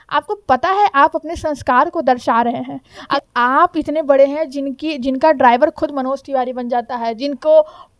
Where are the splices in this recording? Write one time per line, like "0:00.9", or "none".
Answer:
0:03.1